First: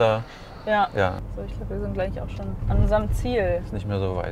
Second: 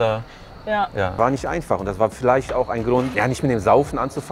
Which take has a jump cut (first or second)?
second